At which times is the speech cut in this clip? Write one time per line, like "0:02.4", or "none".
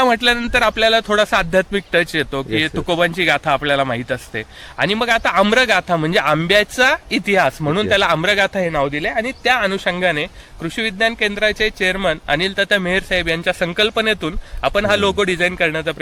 none